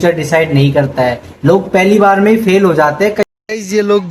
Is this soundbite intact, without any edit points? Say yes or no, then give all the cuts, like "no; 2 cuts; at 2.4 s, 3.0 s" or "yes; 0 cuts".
no; 1 cut; at 3.2 s